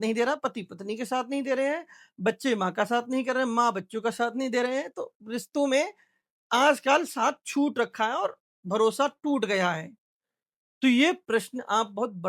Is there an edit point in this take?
no; 0 cuts

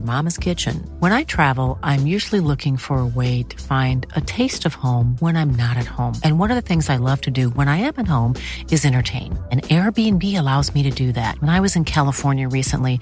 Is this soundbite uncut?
yes; 0 cuts

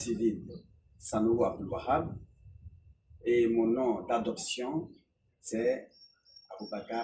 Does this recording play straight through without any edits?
yes; 0 cuts

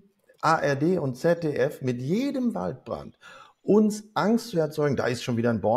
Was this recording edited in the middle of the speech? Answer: no; 0 cuts

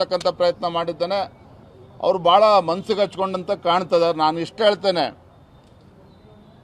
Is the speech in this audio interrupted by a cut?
no; 0 cuts

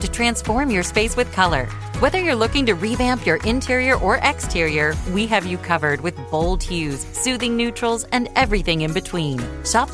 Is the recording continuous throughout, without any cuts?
yes; 0 cuts

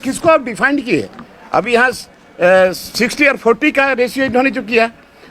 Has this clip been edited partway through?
no; 0 cuts

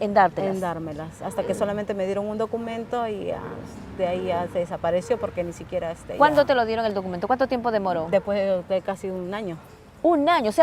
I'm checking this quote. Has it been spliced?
no; 0 cuts

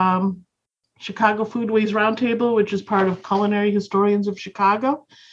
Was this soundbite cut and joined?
no; 0 cuts

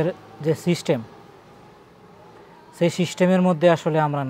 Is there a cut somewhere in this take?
no; 0 cuts

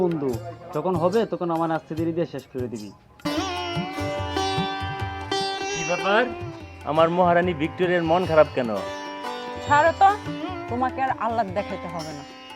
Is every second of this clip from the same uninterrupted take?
no; 1 cut; at 3.2 s

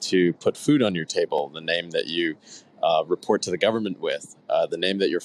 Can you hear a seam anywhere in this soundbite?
no; 0 cuts

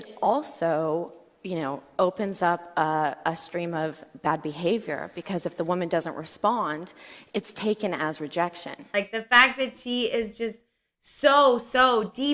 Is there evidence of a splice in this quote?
yes; 1 cut; at 8.9 s

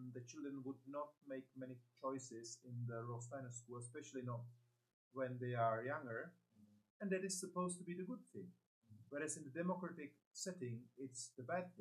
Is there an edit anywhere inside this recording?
no; 0 cuts

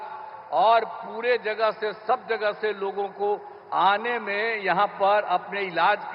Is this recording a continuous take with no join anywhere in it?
yes; 0 cuts

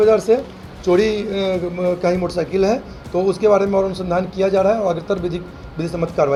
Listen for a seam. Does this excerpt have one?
no; 0 cuts

